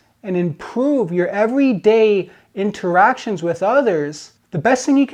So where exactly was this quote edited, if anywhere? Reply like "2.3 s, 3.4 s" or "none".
none